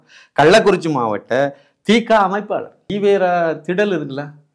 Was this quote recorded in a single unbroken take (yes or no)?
no